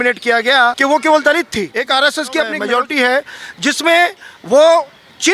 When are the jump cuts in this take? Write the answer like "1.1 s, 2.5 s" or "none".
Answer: 0.8 s, 1.7 s, 2.6 s